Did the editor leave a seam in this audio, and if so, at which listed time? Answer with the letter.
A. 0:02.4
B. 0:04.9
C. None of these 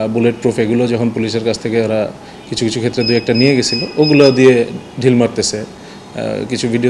C